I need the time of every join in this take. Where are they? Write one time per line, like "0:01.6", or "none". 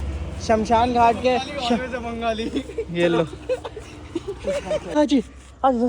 0:04.9